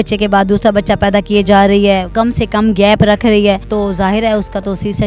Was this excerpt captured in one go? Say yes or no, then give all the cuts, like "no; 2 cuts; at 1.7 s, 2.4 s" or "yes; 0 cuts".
no; 2 cuts; at 2.1 s, 3.6 s